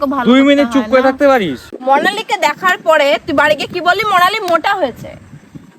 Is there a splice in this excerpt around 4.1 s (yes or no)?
no